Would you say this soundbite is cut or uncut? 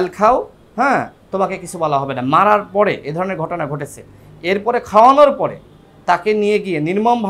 uncut